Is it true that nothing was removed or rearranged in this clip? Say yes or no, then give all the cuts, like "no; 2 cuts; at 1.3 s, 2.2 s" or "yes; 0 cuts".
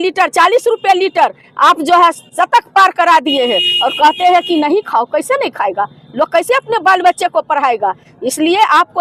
yes; 0 cuts